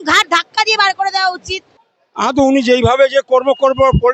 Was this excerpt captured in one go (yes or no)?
yes